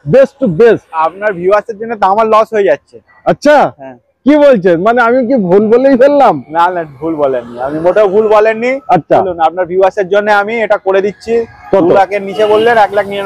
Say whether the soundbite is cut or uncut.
uncut